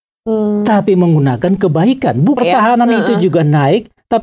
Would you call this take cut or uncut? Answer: cut